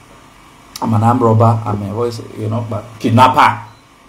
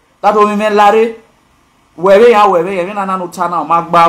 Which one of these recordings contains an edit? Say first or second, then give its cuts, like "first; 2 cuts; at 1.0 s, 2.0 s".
first; 1 cut; at 2.8 s